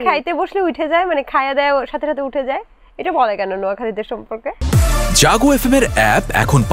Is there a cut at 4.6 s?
yes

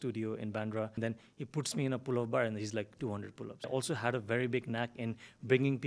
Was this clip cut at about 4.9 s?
no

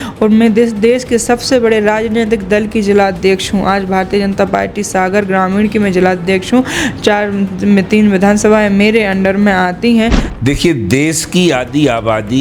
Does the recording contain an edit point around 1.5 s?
no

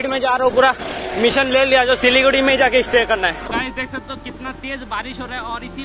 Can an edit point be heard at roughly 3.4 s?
yes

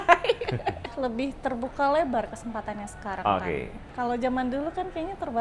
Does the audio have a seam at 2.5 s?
no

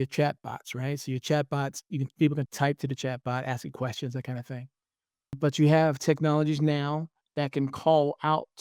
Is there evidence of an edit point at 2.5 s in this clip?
yes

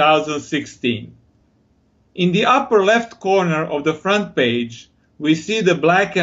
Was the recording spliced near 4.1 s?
no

